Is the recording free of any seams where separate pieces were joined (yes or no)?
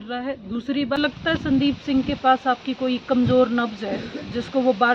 no